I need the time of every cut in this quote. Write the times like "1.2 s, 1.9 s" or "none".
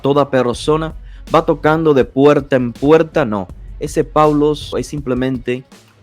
4.7 s